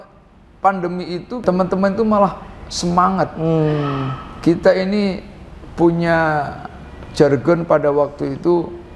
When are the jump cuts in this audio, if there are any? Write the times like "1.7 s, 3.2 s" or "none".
1.4 s